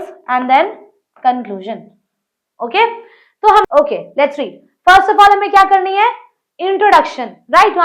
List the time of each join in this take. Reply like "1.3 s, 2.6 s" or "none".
3.6 s